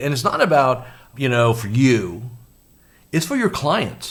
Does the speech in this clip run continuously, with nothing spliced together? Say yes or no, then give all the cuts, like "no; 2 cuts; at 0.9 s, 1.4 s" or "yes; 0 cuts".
yes; 0 cuts